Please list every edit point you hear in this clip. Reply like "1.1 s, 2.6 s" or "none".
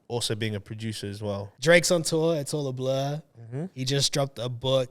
1.5 s